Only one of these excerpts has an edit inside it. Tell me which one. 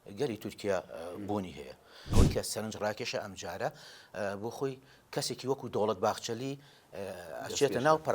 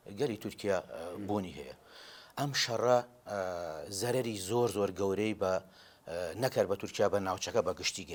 first; 1 cut; at 1.9 s

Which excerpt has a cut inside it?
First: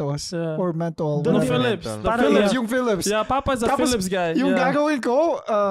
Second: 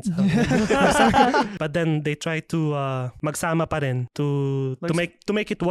second; 3 cuts; at 1.5 s, 3.1 s, 4.1 s

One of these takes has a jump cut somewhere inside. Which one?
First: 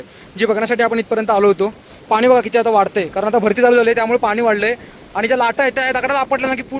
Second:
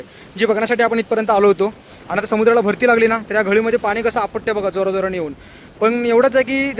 first; 1 cut; at 2.0 s

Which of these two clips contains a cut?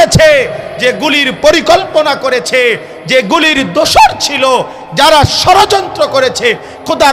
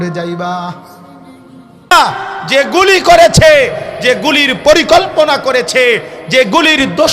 second; 1 cut; at 1.9 s

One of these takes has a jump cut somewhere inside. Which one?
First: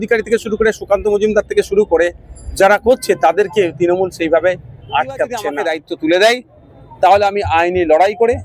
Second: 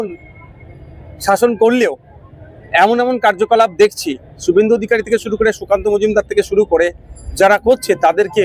first; 1 cut; at 5.4 s

